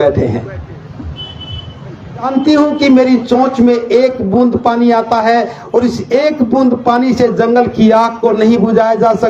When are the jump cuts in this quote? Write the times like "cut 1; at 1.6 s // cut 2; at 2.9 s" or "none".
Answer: cut 1; at 2.2 s